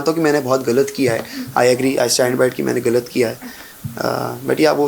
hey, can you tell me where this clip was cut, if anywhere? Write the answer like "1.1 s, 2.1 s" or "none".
none